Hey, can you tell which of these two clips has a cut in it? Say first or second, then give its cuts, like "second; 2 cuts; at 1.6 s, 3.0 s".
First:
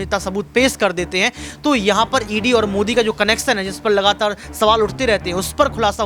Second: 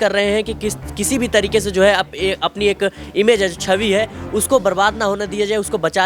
second; 1 cut; at 1.1 s